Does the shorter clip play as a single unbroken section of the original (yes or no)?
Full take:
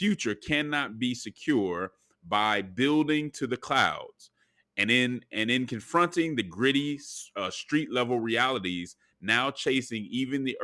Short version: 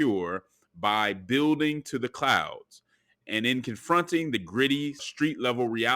no